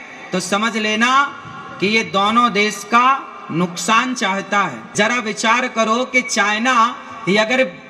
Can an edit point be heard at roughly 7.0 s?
no; 1 cut; at 4.8 s

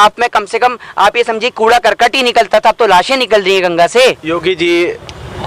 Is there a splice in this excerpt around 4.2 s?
yes; 1 cut; at 4.2 s

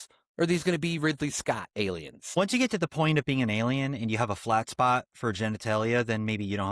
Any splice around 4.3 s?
no; 1 cut; at 2.3 s

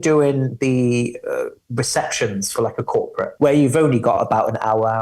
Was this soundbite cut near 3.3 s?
yes; 1 cut; at 3.3 s

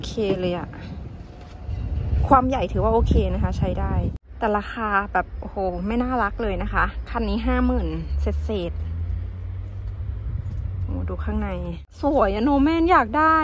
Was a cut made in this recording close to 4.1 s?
yes; 2 cuts; at 4.1 s, 11.9 s

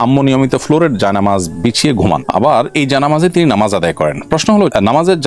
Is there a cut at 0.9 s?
no; 0 cuts

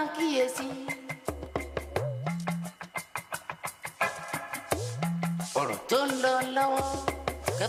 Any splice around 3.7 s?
no; 0 cuts

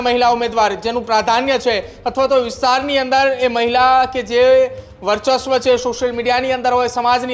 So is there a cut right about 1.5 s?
no; 0 cuts

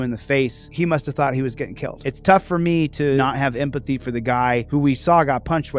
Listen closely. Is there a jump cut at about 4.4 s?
no; 2 cuts; at 1.9 s, 3.2 s

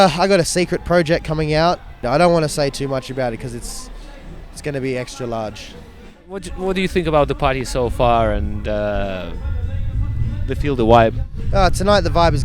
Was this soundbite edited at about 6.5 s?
yes; 2 cuts; at 2.0 s, 6.5 s

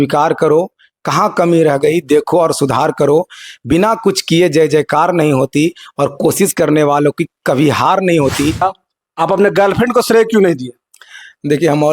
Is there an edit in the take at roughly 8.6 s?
yes; 1 cut; at 8.6 s

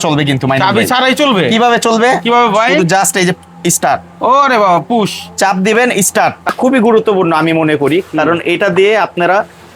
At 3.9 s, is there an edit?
no; 1 cut; at 6.5 s

